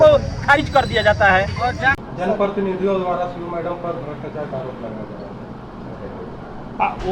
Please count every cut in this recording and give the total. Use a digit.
1